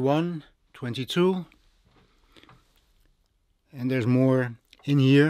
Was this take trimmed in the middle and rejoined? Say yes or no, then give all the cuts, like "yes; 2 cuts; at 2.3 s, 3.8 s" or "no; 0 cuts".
no; 0 cuts